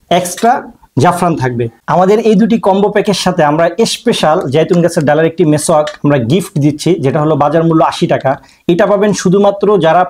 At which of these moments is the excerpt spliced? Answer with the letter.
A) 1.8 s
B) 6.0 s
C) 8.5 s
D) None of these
A